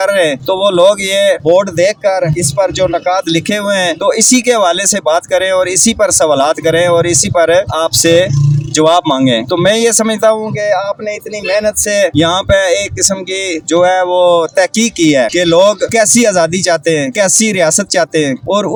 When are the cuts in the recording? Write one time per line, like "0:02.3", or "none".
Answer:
none

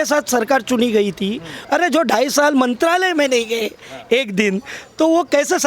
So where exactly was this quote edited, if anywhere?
0:01.5

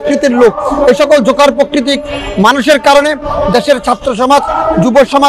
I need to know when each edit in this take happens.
none

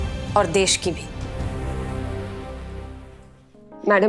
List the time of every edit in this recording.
0:01.3

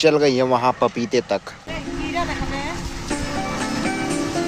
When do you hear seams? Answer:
0:01.8

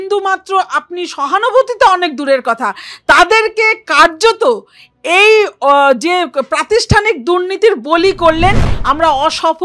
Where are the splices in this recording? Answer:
0:08.7

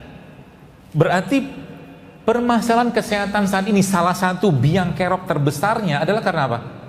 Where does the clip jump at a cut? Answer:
none

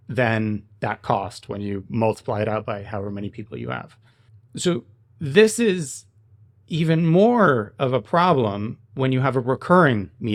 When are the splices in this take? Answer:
none

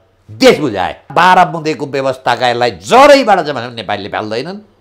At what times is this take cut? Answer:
0:01.1

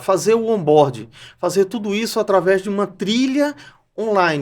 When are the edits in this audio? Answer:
none

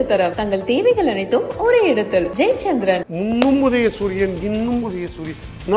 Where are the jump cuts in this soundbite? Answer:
0:03.0

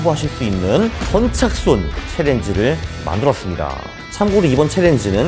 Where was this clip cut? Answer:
none

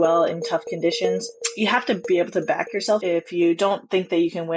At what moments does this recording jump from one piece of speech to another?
0:01.4
0:03.0

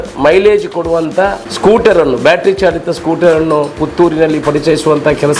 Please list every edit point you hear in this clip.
0:01.5

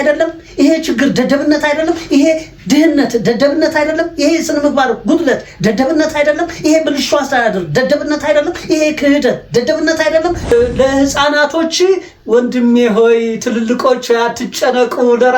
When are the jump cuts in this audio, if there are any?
0:10.5

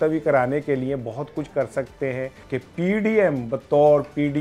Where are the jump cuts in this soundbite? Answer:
0:02.4

